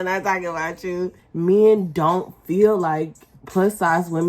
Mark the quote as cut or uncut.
cut